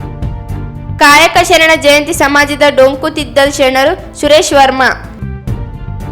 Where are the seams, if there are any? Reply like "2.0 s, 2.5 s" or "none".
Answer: 0.9 s